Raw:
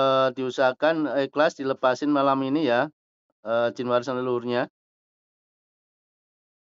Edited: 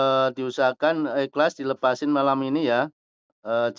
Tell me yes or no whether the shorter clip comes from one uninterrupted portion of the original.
yes